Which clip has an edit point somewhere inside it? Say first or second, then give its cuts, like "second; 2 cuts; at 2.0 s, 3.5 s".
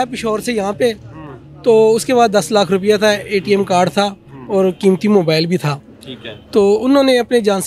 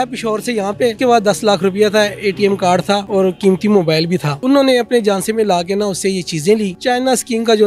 second; 4 cuts; at 1.0 s, 3.1 s, 4.4 s, 6.8 s